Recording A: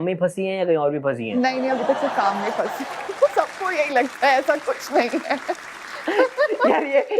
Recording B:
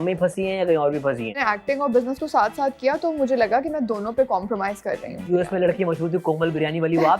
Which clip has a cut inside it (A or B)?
B